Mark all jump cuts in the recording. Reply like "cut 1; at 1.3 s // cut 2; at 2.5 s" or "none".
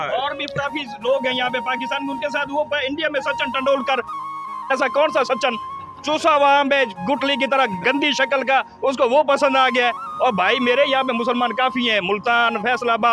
none